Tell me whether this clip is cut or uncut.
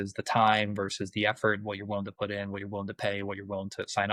uncut